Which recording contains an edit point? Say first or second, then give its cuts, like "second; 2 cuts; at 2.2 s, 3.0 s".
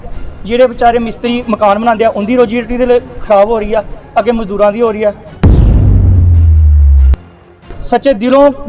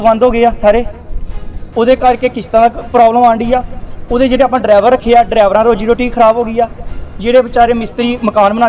first; 2 cuts; at 5.3 s, 7.7 s